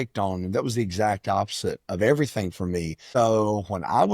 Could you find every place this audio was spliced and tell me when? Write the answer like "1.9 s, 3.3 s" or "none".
3.0 s